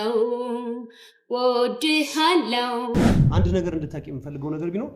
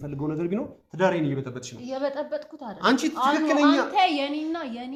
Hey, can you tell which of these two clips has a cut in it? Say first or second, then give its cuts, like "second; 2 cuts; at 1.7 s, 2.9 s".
first; 1 cut; at 3.2 s